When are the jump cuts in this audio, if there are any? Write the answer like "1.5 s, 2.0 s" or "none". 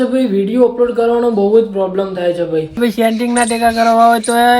2.8 s